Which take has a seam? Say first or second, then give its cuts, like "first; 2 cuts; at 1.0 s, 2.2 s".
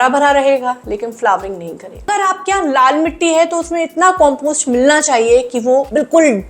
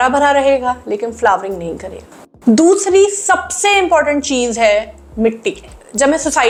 first; 1 cut; at 2.1 s